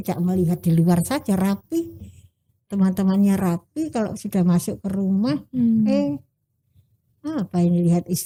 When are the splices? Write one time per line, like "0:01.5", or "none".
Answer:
none